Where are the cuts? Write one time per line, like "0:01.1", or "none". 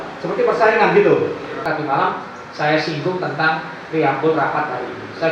0:01.7

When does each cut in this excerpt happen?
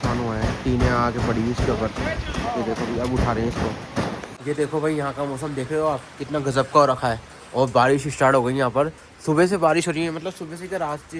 none

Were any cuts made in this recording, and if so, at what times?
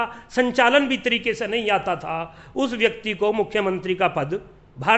none

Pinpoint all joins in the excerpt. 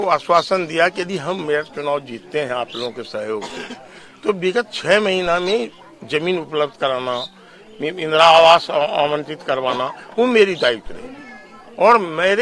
none

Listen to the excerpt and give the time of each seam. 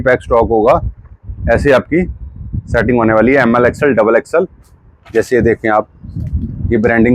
none

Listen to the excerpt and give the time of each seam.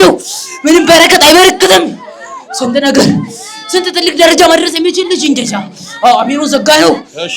none

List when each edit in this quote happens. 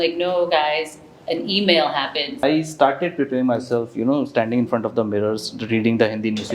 0:02.4

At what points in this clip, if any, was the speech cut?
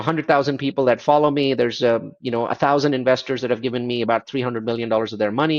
none

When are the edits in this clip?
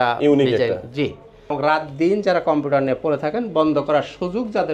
0:01.4

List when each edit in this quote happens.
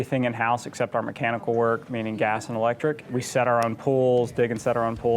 0:03.0

